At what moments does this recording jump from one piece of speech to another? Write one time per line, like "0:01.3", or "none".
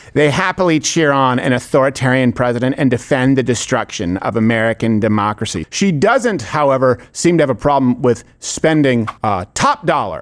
0:05.5